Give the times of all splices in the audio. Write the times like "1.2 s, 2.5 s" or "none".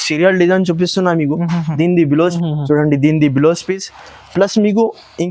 2.3 s